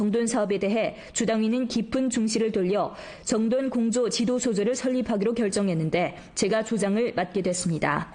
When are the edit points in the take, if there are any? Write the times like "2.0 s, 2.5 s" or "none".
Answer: 4.6 s